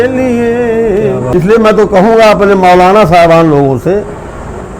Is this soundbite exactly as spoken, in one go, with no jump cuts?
no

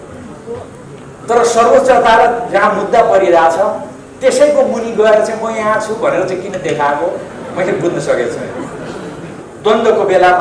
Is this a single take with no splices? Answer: no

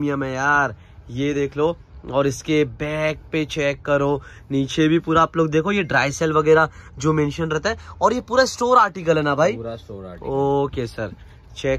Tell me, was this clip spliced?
no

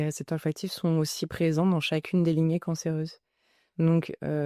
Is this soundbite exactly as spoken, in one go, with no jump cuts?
yes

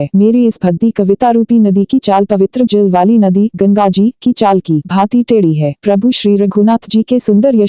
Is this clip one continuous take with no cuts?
yes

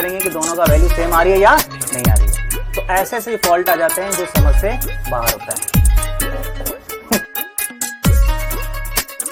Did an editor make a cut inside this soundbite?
no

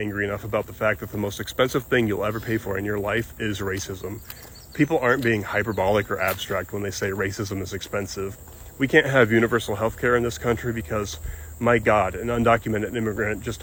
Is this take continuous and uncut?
yes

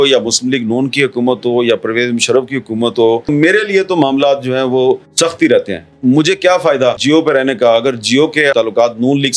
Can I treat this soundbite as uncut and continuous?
no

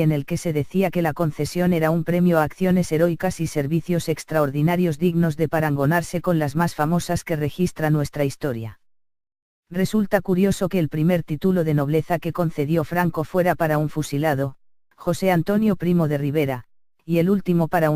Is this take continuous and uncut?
no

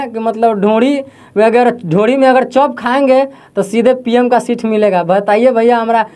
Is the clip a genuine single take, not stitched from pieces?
yes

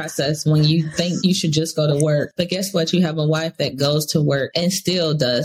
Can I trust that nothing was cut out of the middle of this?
no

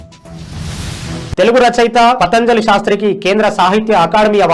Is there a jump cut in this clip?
yes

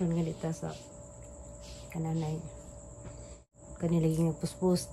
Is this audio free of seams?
no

